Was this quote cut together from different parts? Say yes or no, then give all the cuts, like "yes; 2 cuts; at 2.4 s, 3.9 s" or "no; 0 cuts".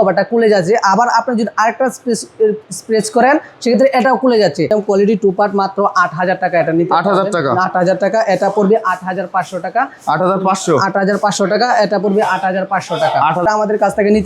yes; 2 cuts; at 4.7 s, 13.4 s